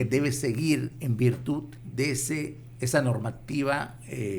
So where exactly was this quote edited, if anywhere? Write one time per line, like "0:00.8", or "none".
0:01.8